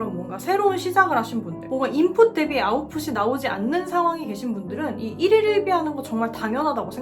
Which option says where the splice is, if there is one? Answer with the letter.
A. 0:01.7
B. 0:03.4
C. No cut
A